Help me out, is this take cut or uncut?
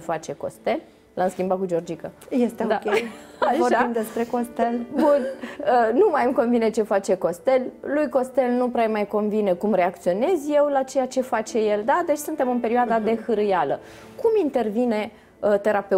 uncut